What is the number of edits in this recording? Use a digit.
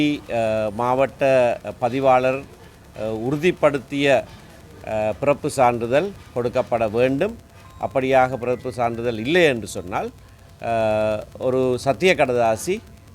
0